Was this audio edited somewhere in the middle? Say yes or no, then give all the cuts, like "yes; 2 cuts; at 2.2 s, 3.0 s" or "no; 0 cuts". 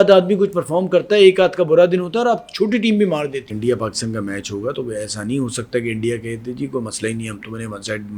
yes; 1 cut; at 3.5 s